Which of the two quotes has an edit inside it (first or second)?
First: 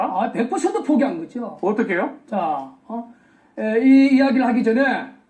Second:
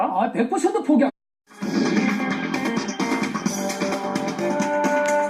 first